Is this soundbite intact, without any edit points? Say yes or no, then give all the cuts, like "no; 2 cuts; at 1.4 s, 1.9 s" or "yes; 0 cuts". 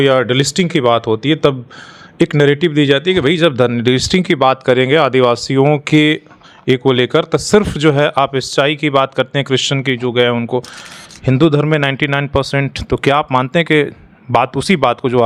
yes; 0 cuts